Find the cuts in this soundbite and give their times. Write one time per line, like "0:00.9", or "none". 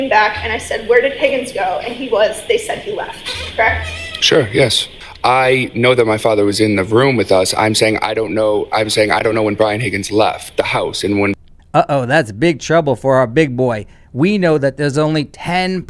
none